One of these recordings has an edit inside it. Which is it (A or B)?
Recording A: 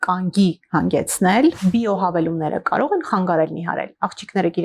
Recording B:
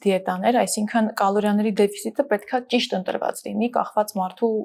A